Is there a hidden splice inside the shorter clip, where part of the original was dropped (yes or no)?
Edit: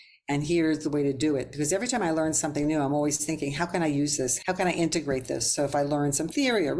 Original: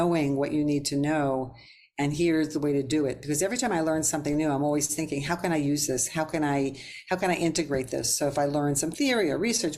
yes